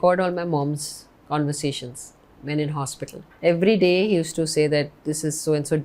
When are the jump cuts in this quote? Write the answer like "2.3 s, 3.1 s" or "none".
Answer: 3.2 s